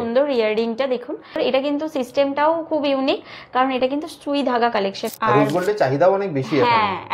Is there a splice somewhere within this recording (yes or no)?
yes